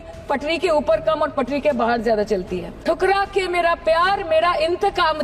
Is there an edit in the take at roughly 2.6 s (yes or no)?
yes